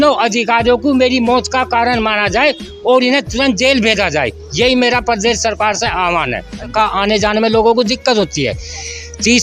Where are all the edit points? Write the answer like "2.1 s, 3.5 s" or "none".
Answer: 6.7 s